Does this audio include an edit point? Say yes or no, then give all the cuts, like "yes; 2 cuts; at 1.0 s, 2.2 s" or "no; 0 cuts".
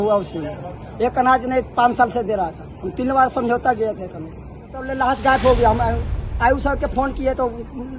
yes; 1 cut; at 4.9 s